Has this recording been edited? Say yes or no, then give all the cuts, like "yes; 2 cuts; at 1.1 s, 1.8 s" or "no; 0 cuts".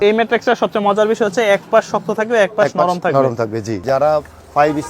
yes; 1 cut; at 3.8 s